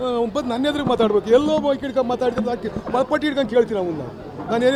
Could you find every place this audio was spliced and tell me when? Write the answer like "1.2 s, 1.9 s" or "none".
none